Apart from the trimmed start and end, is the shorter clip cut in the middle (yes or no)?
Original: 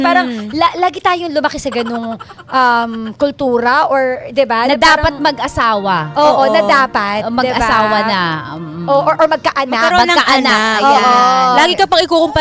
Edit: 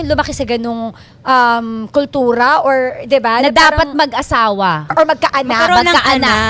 yes